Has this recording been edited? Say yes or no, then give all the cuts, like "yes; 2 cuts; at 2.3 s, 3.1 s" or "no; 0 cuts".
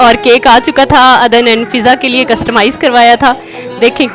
no; 0 cuts